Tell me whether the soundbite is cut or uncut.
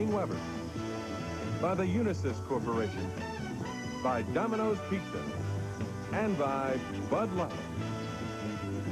uncut